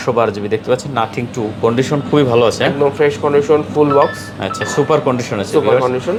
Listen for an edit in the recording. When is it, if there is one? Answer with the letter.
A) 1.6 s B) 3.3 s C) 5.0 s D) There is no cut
D